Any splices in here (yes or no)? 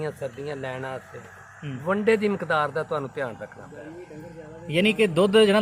no